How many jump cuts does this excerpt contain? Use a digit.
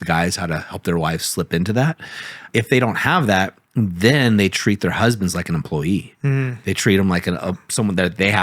1